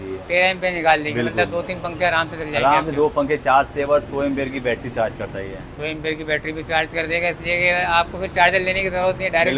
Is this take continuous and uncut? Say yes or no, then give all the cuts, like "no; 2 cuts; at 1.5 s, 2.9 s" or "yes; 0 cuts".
yes; 0 cuts